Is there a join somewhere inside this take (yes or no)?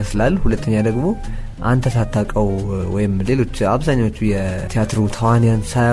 no